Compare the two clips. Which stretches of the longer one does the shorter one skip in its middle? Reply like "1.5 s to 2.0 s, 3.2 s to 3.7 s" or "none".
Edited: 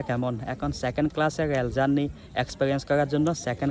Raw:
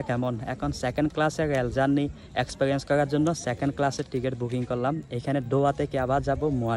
none

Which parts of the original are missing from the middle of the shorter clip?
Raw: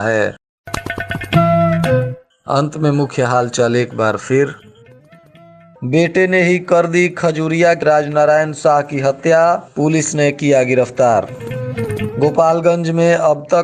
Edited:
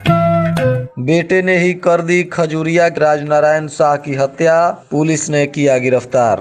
2.2 s to 5.8 s

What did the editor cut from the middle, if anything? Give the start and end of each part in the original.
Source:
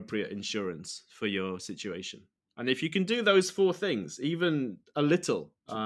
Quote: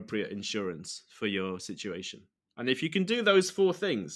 none

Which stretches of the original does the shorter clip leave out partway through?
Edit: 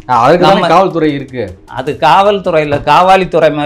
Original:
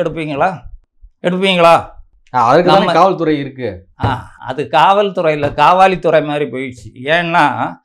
3.9 s to 4.3 s

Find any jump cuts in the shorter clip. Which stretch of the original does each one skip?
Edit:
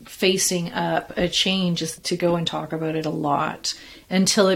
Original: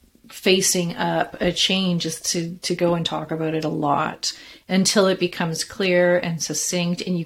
2.2 s to 2.6 s

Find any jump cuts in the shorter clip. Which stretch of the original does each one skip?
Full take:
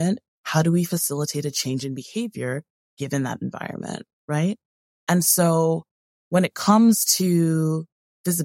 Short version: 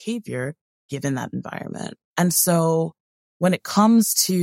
4.1 s to 4.9 s

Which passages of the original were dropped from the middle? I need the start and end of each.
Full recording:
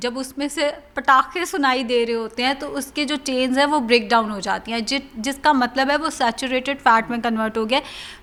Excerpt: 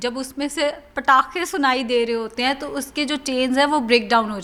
none

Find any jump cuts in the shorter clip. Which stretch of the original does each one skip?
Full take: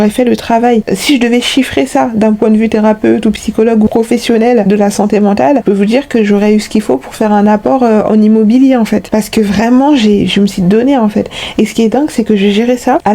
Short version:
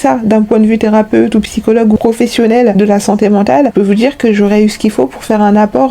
none

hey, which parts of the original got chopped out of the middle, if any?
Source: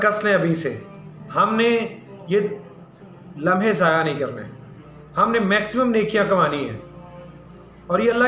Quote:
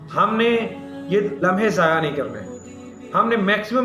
2.5 s to 3.4 s

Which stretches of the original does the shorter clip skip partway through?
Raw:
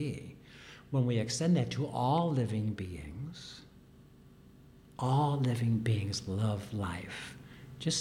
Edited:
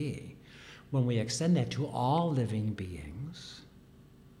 none

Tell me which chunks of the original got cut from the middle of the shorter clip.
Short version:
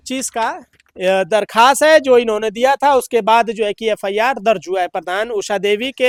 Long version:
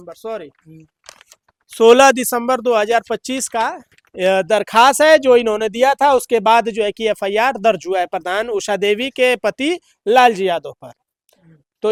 none

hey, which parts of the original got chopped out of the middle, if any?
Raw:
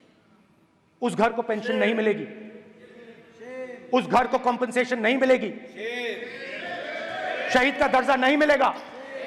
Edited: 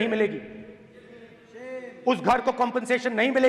none

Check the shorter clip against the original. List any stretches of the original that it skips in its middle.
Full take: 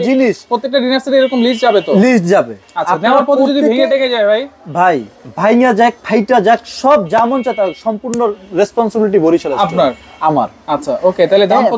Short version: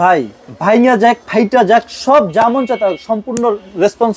none

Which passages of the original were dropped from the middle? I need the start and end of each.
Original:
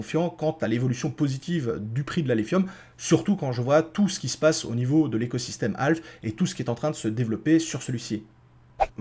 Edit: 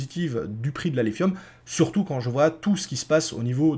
none

